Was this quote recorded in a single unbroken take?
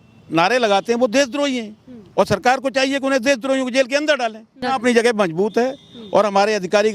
no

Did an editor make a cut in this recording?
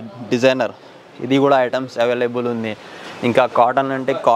no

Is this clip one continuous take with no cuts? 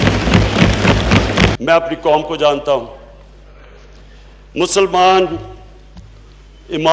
no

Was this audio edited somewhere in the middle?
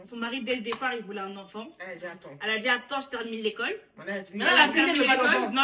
no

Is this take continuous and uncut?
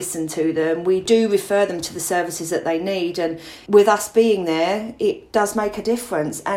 no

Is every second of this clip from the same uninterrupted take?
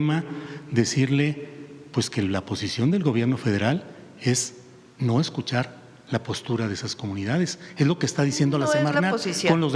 yes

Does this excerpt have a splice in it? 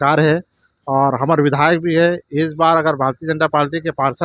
no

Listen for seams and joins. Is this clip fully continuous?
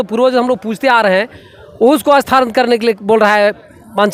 yes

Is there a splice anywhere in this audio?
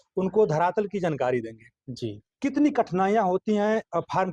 no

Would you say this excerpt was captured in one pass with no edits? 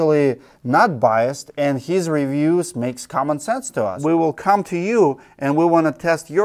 no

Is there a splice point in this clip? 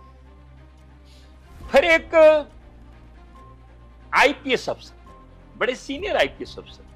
yes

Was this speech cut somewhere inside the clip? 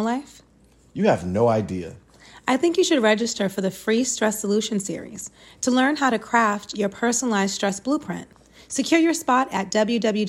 no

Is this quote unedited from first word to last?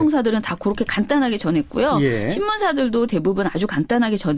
no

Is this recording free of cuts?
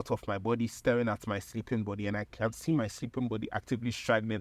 yes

